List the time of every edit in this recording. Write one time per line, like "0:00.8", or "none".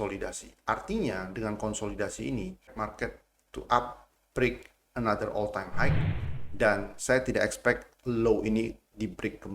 0:02.7